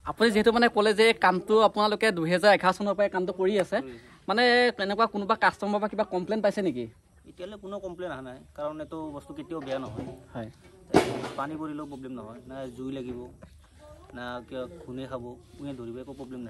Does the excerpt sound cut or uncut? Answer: uncut